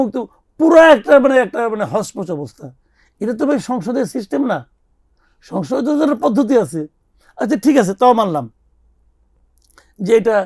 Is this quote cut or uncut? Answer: uncut